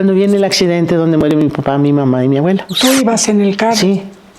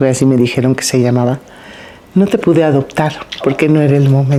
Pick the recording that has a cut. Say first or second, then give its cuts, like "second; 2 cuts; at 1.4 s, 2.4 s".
first; 1 cut; at 2.7 s